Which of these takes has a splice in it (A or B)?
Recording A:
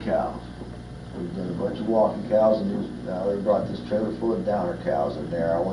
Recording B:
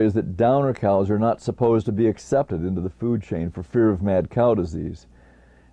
B